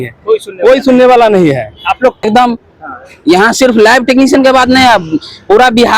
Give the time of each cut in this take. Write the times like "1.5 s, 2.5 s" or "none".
2.2 s